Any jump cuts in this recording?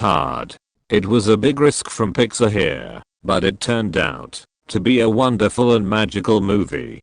no; 0 cuts

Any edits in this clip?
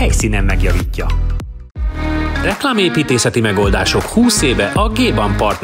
yes; 1 cut; at 1.6 s

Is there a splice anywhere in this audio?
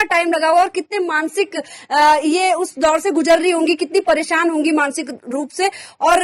no; 0 cuts

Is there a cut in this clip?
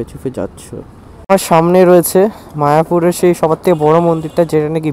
yes; 1 cut; at 1.3 s

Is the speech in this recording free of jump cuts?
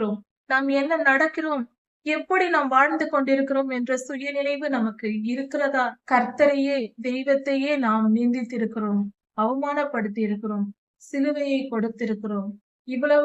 no; 1 cut; at 6.0 s

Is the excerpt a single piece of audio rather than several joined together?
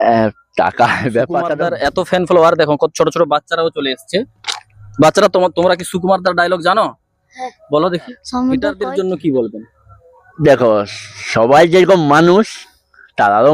no; 2 cuts; at 1.6 s, 8.8 s

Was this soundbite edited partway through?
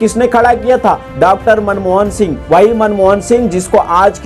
no; 0 cuts

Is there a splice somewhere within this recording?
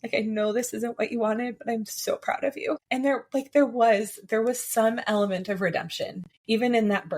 yes; 1 cut; at 6.3 s

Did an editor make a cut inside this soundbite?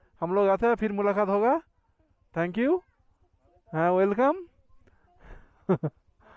no; 0 cuts

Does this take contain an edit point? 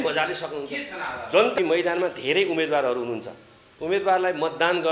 yes; 1 cut; at 1.5 s

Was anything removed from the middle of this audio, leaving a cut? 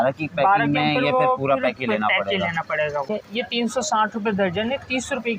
yes; 1 cut; at 3.1 s

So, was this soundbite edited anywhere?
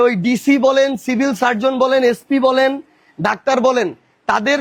no; 0 cuts

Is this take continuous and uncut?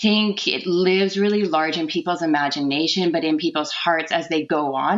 yes; 0 cuts

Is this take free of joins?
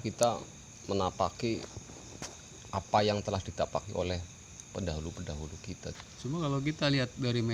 no; 1 cut; at 5.9 s

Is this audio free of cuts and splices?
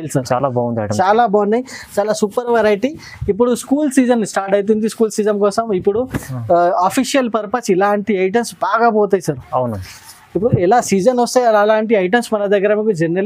yes; 0 cuts

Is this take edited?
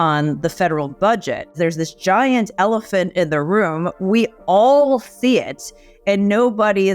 yes; 1 cut; at 1.6 s

